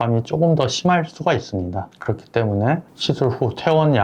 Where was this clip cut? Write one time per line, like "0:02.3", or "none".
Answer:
none